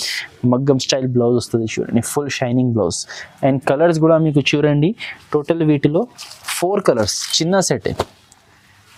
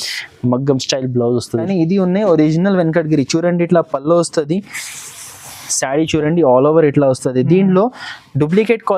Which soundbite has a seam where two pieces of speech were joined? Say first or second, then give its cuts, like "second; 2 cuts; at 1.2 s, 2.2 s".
second; 1 cut; at 1.7 s